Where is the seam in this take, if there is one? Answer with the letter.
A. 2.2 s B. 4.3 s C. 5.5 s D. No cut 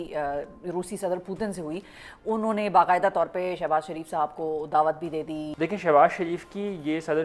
C